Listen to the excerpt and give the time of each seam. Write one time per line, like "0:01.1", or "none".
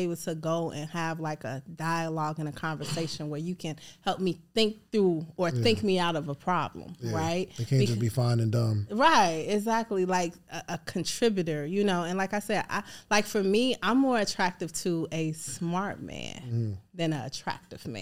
none

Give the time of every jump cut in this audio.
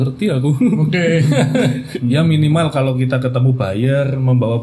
0:01.9

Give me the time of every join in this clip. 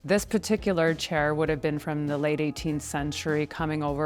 none

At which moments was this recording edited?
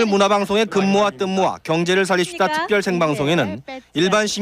none

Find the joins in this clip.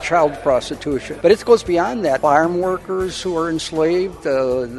0:01.1
0:02.2

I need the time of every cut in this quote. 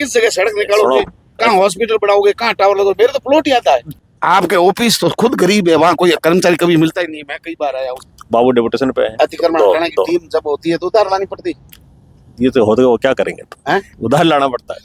0:03.9
0:08.0

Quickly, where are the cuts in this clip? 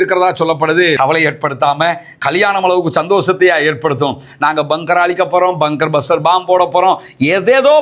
0:01.0

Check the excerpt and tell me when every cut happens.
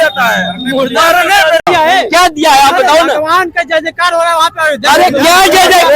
0:01.7

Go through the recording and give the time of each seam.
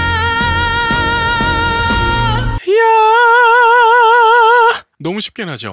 none

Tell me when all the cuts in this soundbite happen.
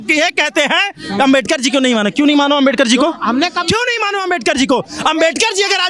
none

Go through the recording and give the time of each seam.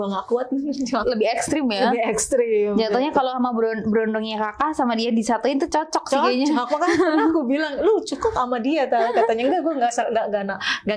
0:01.0

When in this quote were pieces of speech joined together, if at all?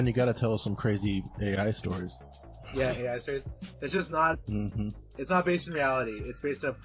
0:03.6

